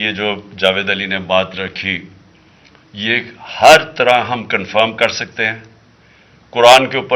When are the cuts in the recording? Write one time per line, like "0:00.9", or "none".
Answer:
none